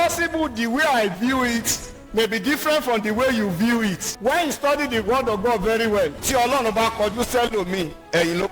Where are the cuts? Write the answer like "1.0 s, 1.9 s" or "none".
4.1 s, 6.2 s